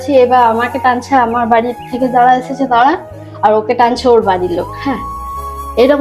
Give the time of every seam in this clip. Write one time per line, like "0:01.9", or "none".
none